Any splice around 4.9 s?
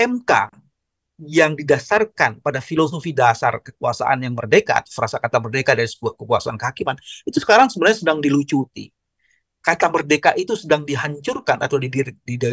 no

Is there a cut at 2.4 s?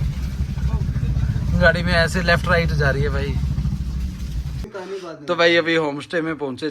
no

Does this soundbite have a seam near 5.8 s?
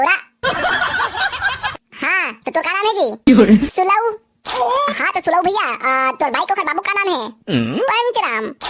no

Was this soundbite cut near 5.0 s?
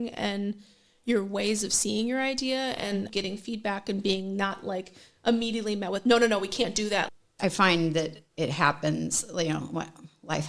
no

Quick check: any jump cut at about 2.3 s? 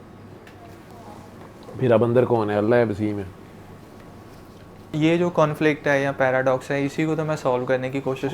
no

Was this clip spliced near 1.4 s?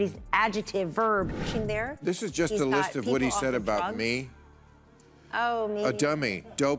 yes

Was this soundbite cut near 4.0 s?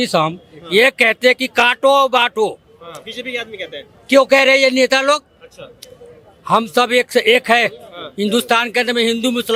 no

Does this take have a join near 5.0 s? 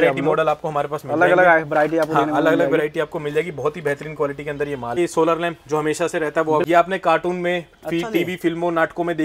yes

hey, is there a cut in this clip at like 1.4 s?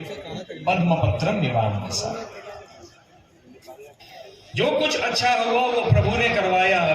no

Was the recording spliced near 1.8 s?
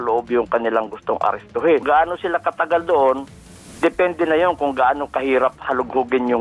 yes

